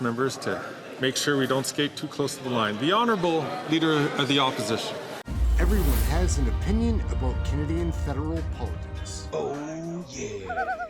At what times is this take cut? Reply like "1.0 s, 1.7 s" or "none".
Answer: 5.2 s